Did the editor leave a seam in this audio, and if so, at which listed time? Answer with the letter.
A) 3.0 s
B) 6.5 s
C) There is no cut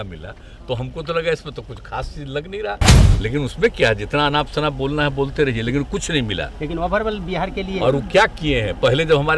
A